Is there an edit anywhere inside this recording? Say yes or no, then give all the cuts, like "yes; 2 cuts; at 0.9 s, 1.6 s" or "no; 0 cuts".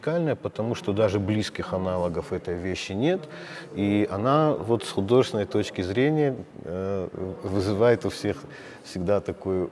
no; 0 cuts